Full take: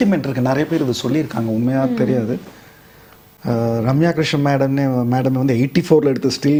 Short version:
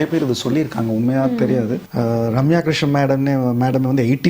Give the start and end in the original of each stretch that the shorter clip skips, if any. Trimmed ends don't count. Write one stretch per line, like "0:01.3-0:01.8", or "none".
0:02.4-0:03.4

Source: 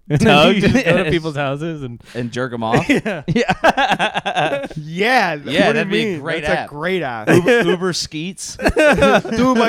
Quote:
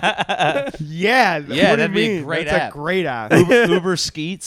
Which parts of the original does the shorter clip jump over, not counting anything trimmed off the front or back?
none

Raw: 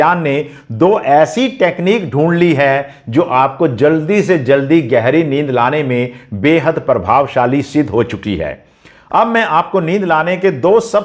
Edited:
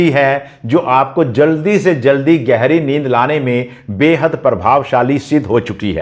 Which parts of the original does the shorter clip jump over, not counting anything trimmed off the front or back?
none

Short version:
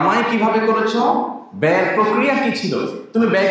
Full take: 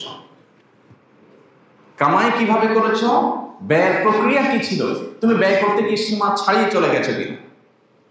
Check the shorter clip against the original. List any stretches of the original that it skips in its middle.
none

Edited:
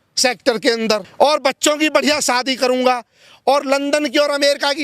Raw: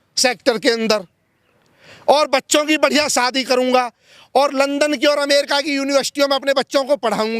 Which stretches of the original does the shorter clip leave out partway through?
0:01.1-0:02.0

